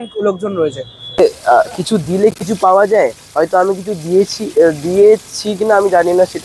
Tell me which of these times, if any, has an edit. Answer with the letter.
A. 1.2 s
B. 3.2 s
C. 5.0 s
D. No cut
A